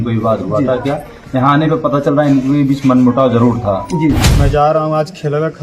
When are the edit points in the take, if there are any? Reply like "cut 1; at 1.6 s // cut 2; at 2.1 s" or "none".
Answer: cut 1; at 4.3 s